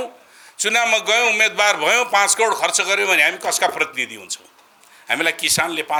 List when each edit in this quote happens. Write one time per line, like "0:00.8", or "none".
none